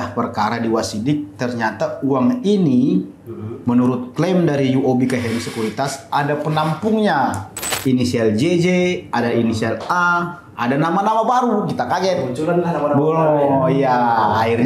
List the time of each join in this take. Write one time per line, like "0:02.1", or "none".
0:07.7